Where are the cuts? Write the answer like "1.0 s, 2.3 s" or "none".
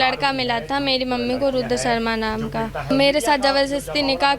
2.9 s